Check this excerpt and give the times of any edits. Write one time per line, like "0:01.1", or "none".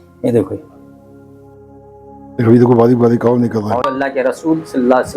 0:03.9